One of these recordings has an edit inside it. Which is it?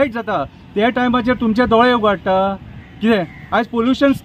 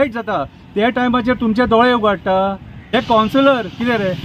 second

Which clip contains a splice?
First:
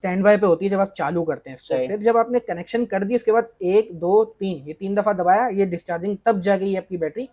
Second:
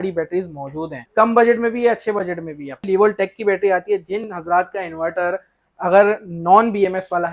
second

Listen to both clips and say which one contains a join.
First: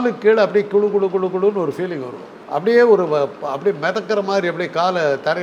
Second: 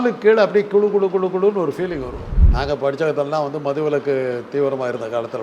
second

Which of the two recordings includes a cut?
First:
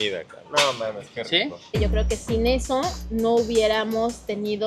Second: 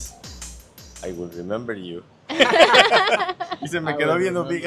first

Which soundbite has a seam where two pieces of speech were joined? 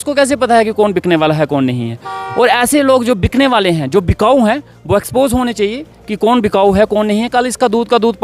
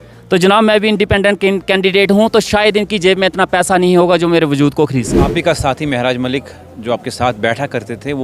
second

